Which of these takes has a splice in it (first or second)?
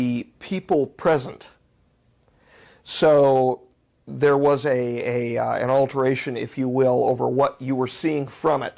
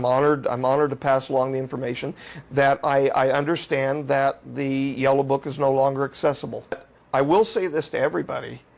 second